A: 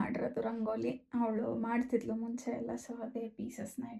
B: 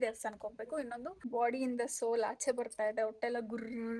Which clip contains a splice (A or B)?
B